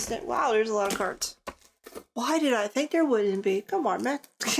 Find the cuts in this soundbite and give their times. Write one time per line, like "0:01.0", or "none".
none